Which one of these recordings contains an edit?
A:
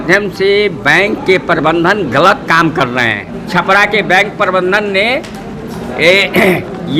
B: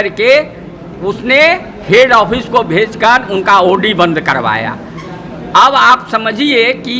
A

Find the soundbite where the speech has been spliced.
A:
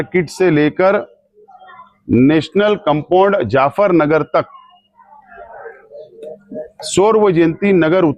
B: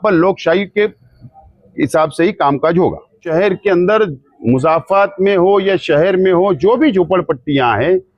B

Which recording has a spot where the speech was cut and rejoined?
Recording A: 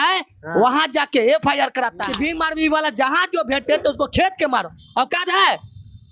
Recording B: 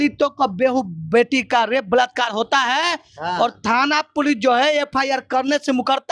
A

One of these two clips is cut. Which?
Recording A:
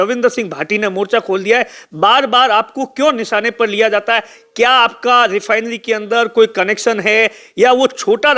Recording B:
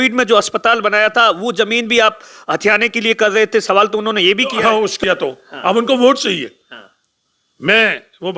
B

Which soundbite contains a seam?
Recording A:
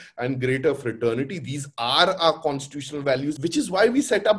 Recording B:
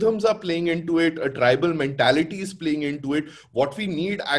A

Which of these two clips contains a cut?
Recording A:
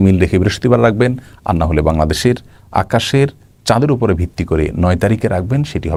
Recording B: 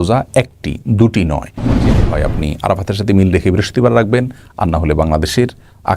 B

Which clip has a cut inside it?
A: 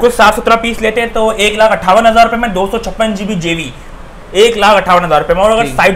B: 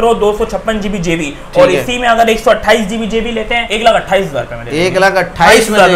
B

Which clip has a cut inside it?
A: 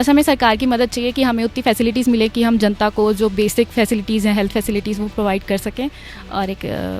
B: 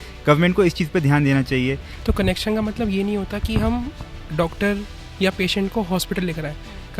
B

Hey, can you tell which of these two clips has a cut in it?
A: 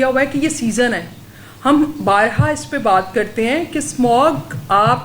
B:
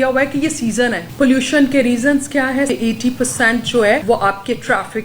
B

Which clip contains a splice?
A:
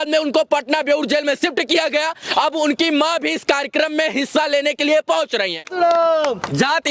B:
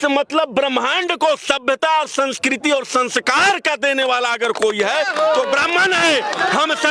A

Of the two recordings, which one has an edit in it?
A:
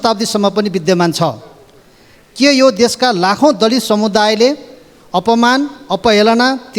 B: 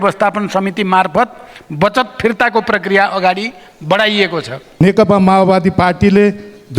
B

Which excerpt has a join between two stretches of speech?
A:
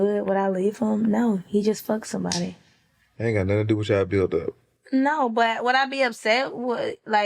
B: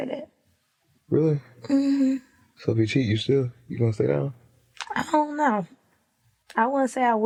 A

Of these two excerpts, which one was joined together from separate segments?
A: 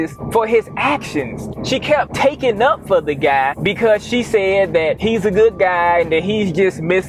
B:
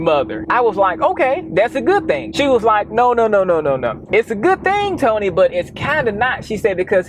A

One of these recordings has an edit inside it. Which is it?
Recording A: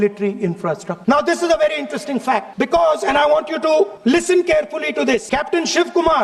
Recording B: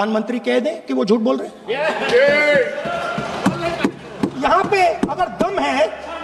A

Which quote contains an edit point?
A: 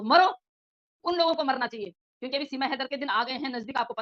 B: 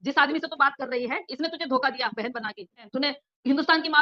B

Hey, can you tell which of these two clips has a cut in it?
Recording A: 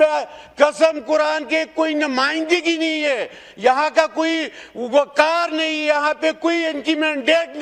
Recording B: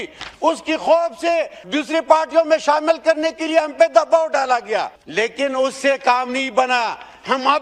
B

